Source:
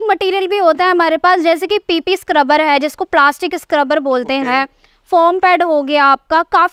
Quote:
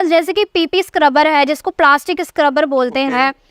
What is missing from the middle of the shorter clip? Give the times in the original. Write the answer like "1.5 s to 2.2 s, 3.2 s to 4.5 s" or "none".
none